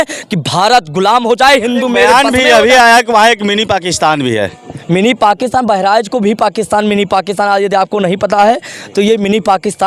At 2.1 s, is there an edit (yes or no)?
yes